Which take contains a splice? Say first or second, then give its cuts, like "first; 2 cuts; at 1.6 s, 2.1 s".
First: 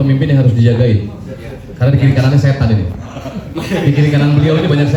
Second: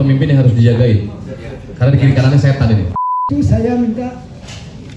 second; 1 cut; at 3.2 s